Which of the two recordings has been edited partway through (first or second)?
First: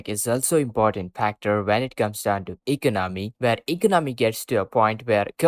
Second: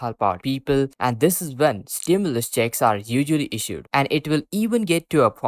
second